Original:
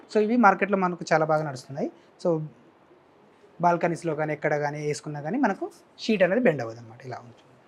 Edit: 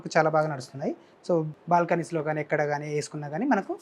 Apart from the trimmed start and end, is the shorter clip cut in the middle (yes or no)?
yes